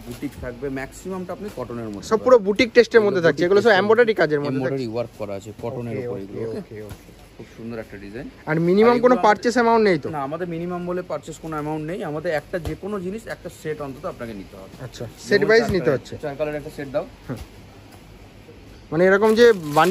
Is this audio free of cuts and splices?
yes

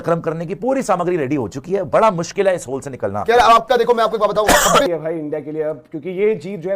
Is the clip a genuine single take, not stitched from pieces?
no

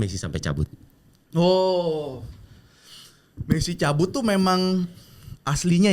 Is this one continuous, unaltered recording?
yes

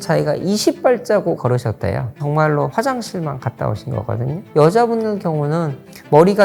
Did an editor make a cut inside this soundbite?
yes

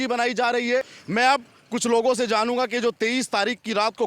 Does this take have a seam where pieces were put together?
yes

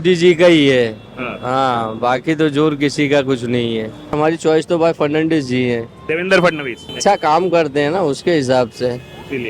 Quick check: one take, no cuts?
no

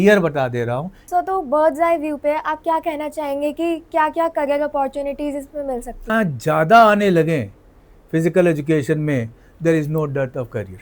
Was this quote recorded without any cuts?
no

